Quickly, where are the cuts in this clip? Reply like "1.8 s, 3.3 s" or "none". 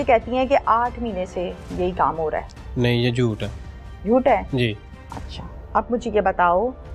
none